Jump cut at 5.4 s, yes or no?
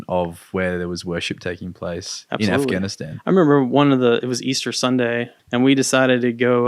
yes